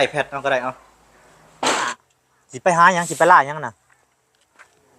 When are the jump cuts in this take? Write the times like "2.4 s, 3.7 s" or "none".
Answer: 1.9 s